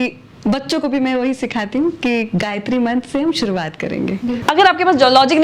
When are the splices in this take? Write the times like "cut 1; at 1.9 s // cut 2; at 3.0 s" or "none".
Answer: cut 1; at 4.4 s